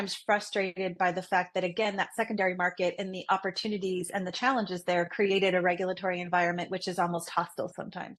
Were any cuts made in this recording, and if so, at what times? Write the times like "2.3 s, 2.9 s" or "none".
none